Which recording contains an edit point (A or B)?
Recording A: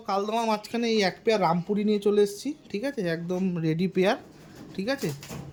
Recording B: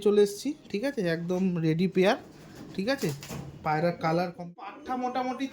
B